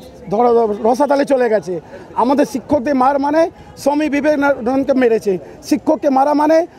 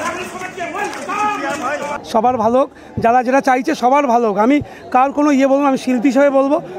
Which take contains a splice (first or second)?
second